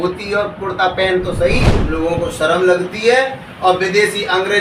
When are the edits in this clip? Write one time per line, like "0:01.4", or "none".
0:01.7

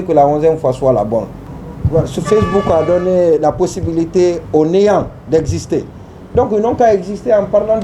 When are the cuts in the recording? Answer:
0:01.4

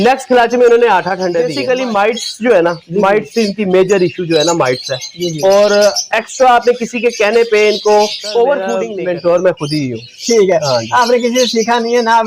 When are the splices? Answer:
0:01.5
0:08.8

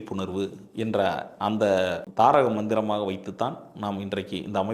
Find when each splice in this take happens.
0:02.0

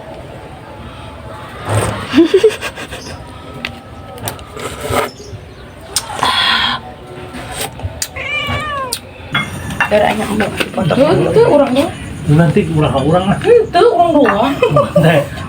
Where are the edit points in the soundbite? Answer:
0:09.3

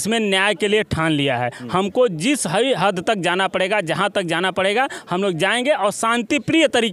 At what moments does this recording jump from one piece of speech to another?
none

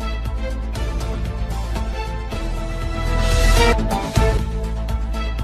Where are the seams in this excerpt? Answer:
0:00.9

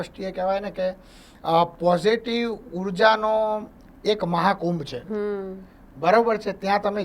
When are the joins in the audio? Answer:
none

